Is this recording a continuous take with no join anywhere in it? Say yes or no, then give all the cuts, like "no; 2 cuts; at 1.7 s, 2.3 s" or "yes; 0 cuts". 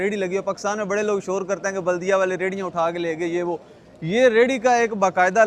yes; 0 cuts